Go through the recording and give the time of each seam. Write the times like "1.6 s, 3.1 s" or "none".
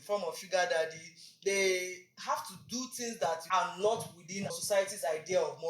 3.4 s, 4.5 s